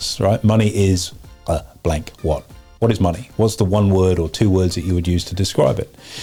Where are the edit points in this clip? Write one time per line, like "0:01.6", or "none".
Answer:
none